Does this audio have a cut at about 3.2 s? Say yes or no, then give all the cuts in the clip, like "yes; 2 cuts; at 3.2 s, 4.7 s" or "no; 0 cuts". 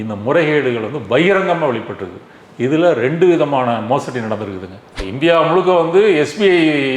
no; 1 cut; at 5.0 s